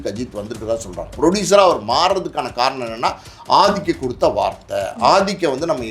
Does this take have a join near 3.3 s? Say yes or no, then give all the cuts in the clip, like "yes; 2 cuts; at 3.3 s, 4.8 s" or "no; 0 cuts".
no; 1 cut; at 1.1 s